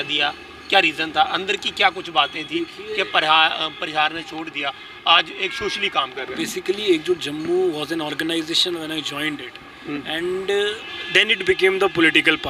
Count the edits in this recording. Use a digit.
0